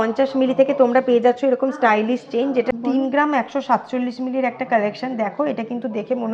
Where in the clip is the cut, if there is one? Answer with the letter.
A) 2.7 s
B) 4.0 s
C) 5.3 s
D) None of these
A